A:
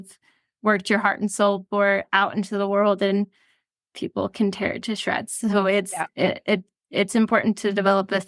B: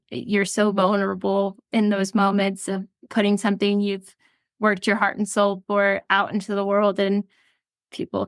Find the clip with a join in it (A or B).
B